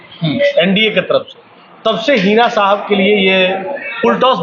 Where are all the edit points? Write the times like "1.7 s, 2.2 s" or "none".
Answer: none